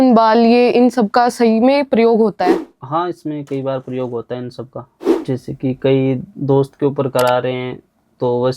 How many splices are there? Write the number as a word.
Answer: one